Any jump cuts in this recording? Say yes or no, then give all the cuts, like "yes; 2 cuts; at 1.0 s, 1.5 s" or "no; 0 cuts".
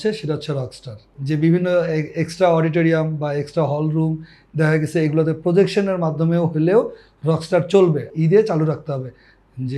yes; 2 cuts; at 1.1 s, 8.1 s